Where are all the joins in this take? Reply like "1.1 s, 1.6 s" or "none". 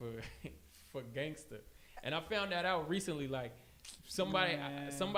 none